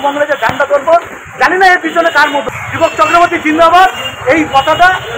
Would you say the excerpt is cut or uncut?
cut